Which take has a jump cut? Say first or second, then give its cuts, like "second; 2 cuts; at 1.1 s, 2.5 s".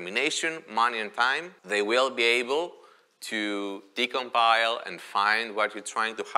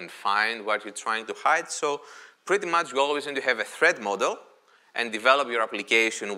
first; 1 cut; at 1.5 s